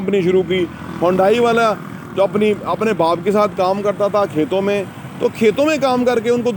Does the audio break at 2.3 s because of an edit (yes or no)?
no